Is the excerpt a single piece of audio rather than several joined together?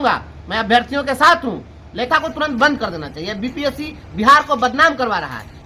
no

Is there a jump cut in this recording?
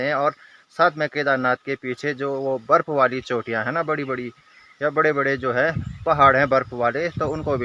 no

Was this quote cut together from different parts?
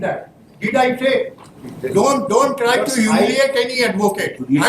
yes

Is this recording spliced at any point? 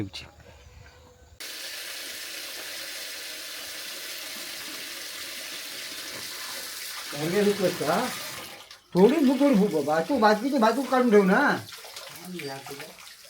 yes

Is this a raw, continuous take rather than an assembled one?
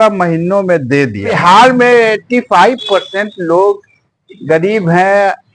no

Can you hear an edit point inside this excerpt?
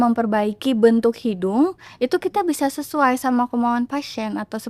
no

